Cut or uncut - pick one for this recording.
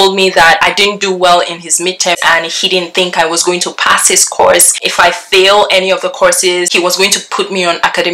cut